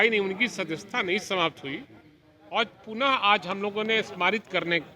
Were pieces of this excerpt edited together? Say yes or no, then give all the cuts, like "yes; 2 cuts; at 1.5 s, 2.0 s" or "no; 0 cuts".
no; 0 cuts